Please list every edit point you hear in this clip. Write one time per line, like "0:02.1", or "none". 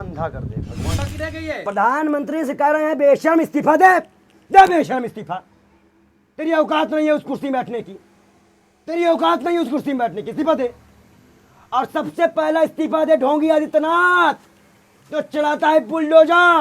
0:01.0